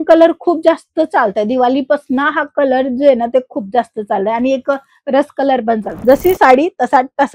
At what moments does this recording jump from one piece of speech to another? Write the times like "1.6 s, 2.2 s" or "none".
5.9 s